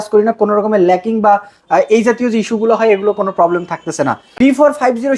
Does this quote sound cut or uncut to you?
cut